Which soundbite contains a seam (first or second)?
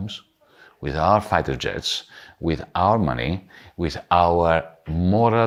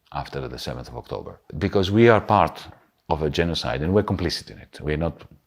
second